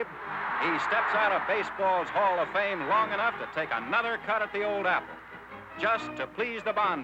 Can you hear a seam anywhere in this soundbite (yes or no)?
no